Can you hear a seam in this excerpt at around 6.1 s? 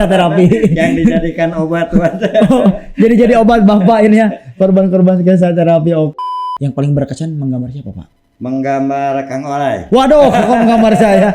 yes; 1 cut; at 6.1 s

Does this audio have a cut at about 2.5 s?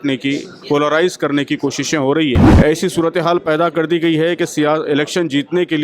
yes; 1 cut; at 2.5 s

